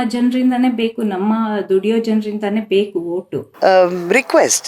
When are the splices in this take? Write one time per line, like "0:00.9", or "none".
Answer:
0:03.4